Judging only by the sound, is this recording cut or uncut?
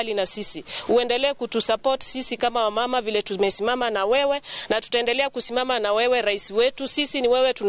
uncut